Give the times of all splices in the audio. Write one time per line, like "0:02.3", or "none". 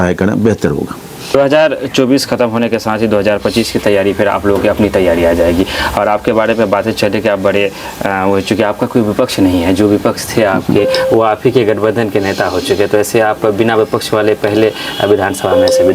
0:01.3